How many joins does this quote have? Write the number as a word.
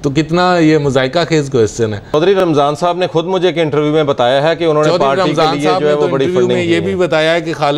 one